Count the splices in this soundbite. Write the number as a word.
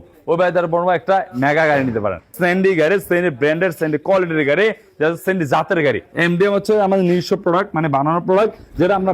two